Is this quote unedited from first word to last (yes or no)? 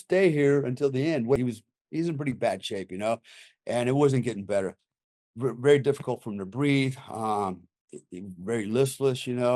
no